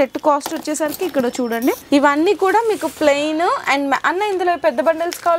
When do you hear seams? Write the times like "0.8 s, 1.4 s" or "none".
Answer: 1.8 s